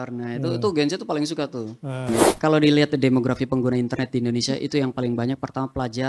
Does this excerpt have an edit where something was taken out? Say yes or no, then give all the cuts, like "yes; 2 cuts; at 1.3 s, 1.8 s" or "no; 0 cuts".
yes; 1 cut; at 2.1 s